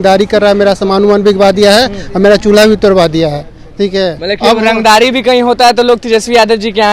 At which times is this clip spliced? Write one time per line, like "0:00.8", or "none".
none